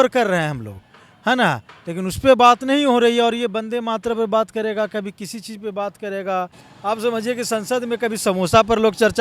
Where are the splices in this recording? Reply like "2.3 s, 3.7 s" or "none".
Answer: 6.6 s

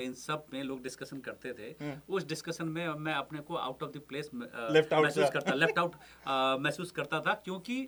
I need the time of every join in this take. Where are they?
none

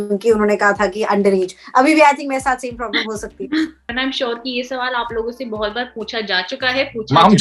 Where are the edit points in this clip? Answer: 3.9 s

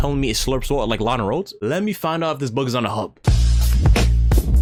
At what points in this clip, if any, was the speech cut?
none

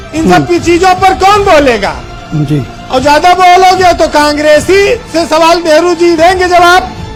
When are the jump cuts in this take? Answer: none

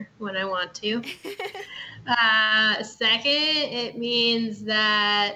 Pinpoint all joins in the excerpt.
none

